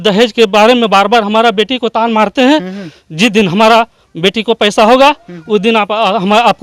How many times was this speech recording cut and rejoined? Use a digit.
0